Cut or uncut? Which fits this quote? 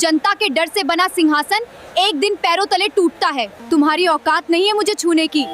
cut